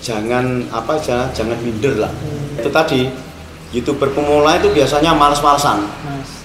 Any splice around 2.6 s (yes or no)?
yes